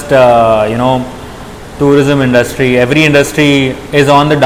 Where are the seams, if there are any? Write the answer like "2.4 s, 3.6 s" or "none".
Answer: none